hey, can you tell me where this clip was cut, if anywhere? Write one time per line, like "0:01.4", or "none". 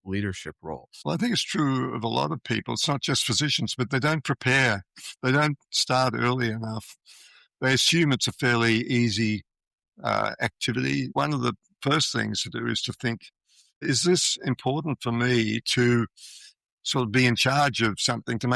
0:11.1
0:13.8